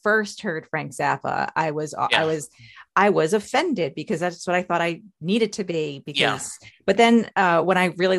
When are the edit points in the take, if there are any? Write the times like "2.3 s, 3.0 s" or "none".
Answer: none